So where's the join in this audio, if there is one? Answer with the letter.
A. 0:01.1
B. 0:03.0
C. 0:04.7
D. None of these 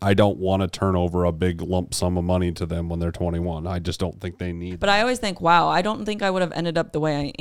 C